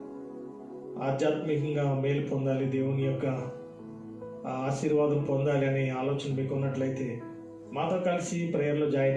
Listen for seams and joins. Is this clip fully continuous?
yes; 0 cuts

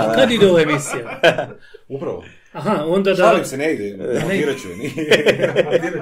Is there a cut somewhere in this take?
no; 0 cuts

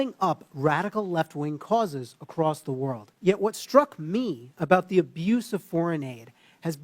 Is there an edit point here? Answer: yes; 1 cut; at 3.1 s

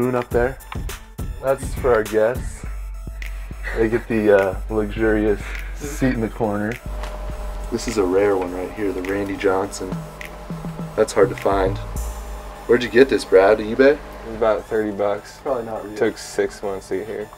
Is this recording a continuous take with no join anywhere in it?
no; 1 cut; at 1.0 s

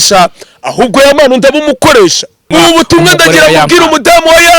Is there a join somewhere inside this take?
yes; 1 cut; at 2.3 s

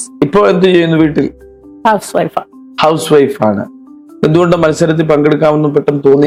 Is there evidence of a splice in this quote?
no; 0 cuts

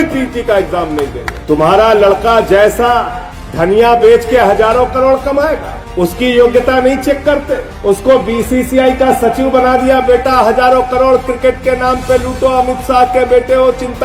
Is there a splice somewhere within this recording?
yes; 1 cut; at 1.3 s

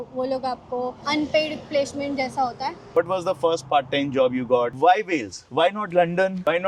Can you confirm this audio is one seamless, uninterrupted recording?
no; 2 cuts; at 2.9 s, 4.7 s

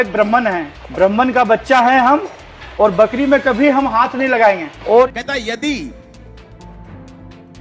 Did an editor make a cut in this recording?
yes; 1 cut; at 5.1 s

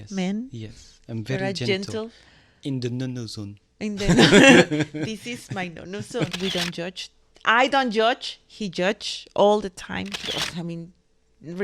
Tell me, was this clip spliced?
yes; 2 cuts; at 6.3 s, 10.2 s

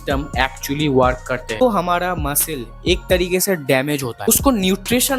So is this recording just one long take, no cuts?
no; 2 cuts; at 1.6 s, 4.3 s

